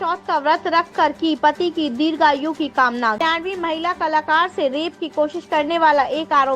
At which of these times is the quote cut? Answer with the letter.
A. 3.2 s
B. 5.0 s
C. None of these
A